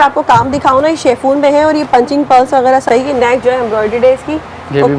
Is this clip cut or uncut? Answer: cut